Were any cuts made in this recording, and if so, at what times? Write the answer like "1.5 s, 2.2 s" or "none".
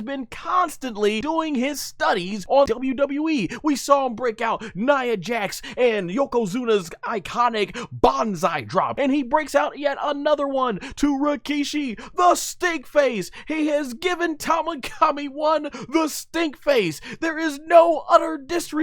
1.2 s, 2.6 s, 8.9 s